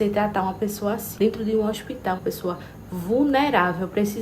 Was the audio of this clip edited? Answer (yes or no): yes